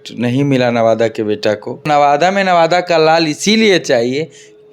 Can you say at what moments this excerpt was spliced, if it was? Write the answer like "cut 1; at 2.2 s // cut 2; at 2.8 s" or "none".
cut 1; at 1.9 s